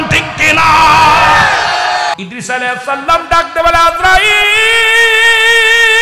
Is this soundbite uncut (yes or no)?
no